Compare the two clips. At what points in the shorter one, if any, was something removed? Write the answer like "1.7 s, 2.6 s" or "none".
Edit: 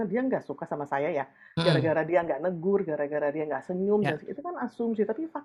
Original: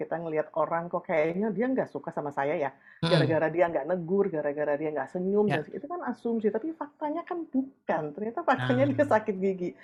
none

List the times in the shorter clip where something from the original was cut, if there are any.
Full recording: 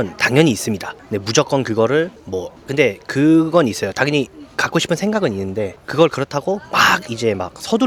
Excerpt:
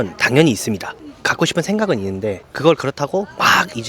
1.1 s

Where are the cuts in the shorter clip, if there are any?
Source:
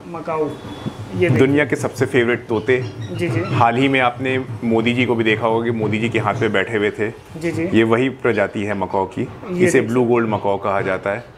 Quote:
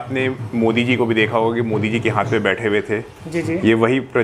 none

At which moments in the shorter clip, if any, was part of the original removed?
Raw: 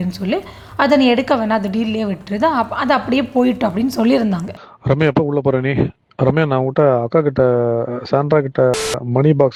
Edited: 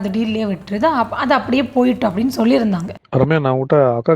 3.0 s

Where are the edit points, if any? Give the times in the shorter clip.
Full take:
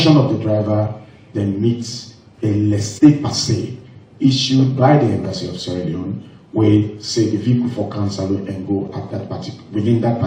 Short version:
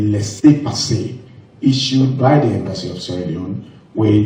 none

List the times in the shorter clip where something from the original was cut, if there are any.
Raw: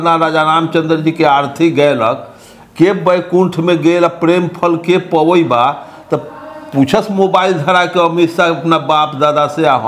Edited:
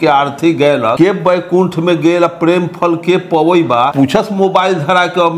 0.9 s, 3.9 s

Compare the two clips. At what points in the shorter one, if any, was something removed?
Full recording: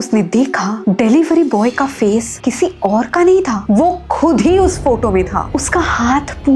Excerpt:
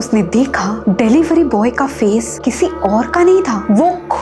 none

